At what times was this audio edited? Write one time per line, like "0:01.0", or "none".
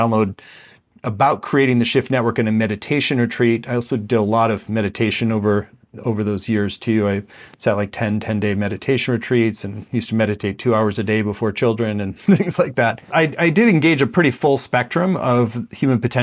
0:13.1